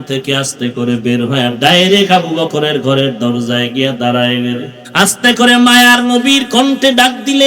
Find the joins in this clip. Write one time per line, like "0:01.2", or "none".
0:04.8